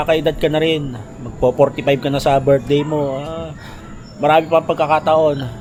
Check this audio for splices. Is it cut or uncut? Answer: uncut